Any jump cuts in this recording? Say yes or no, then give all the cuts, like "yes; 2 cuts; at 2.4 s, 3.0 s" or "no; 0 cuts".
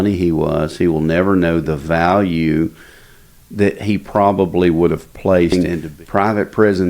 yes; 1 cut; at 5.5 s